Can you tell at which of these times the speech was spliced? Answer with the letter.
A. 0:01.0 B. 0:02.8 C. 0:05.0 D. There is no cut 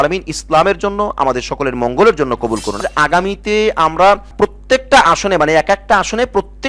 B